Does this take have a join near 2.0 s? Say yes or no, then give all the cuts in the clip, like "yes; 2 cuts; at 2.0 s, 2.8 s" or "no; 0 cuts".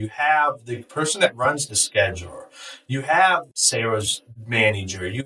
no; 1 cut; at 3.5 s